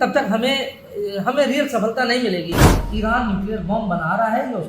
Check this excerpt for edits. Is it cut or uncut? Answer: cut